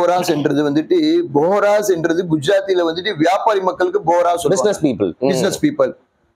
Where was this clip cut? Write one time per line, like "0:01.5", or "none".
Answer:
none